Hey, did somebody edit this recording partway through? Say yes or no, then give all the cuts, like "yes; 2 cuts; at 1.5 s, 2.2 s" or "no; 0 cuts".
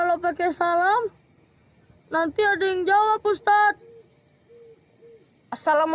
no; 0 cuts